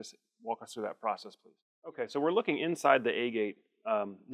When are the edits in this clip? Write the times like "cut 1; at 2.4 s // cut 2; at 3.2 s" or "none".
cut 1; at 1.6 s

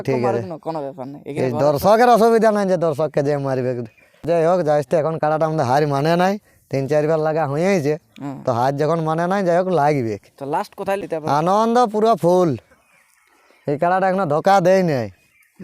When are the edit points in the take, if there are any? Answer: cut 1; at 4.2 s // cut 2; at 11.0 s

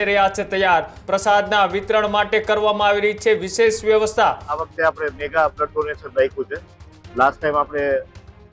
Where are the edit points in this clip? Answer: cut 1; at 0.9 s // cut 2; at 4.6 s

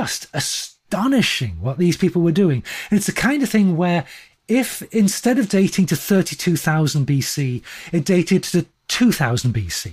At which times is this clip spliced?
none

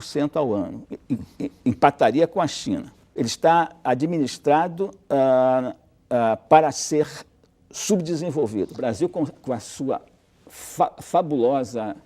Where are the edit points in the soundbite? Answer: cut 1; at 3.1 s

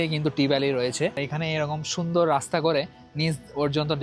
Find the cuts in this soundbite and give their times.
cut 1; at 1.2 s

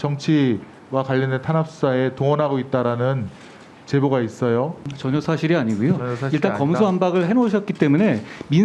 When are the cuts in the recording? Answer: cut 1; at 4.9 s

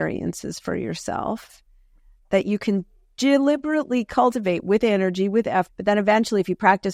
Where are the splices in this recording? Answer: none

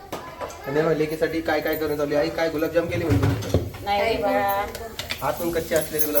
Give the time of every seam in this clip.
none

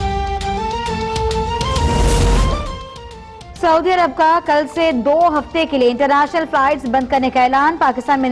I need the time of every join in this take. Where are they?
cut 1; at 1.5 s

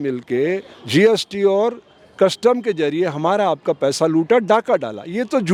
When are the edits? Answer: none

